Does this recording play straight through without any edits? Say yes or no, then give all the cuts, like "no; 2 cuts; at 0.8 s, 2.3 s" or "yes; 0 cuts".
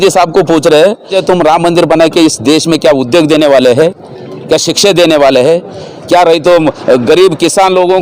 no; 1 cut; at 1.2 s